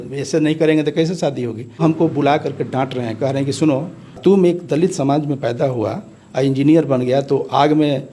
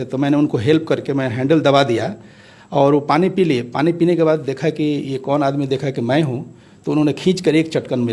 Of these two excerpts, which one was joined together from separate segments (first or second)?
first